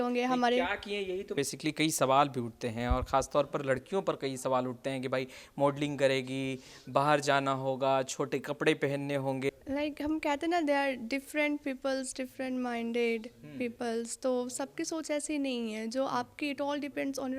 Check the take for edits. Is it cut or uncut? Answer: cut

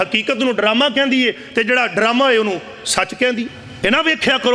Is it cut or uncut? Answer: cut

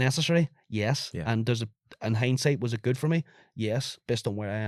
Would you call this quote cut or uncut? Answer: uncut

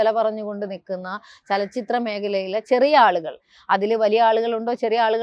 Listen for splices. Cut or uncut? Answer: uncut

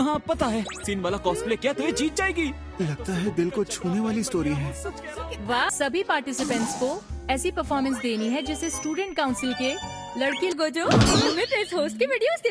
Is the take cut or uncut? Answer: cut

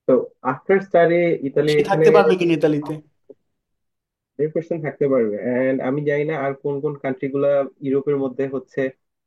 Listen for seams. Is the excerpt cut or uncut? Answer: uncut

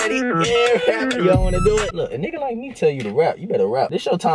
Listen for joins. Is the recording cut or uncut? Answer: uncut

